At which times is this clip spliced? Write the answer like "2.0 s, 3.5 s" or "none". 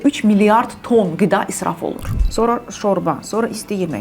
2.1 s